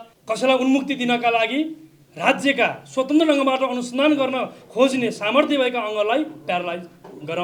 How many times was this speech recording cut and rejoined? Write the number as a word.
zero